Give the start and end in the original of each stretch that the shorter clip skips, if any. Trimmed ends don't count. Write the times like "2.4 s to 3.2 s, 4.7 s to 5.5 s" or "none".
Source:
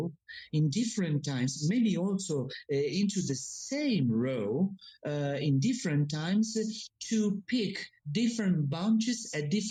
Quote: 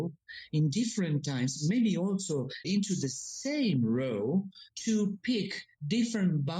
2.6 s to 2.9 s, 4.9 s to 6.9 s